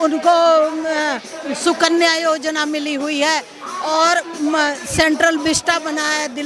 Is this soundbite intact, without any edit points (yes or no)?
yes